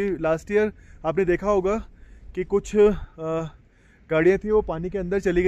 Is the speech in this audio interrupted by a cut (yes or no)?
no